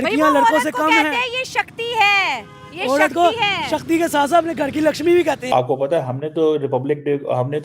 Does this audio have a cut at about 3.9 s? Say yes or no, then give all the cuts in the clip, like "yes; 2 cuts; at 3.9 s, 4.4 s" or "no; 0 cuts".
no; 1 cut; at 5.5 s